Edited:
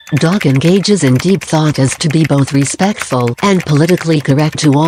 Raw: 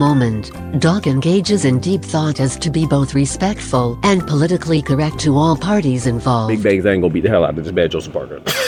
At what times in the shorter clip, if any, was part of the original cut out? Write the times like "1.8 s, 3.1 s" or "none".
none